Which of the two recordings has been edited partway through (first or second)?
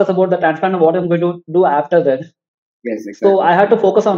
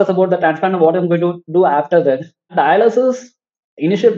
second